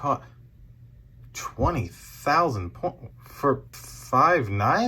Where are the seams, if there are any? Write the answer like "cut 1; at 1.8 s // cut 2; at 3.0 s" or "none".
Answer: cut 1; at 3.8 s